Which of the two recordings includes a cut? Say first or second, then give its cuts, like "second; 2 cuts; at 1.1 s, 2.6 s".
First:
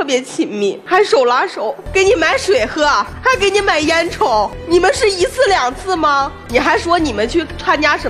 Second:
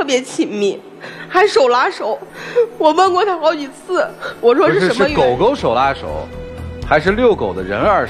first; 5 cuts; at 0.8 s, 1.8 s, 3.1 s, 4.6 s, 6.4 s